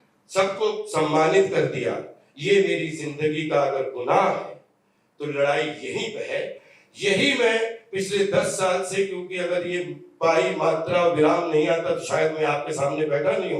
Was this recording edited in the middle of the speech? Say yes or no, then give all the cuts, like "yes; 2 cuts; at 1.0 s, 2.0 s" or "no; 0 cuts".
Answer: no; 0 cuts